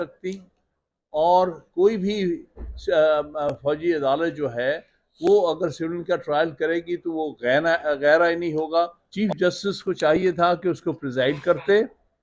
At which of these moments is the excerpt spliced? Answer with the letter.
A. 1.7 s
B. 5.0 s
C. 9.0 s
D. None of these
C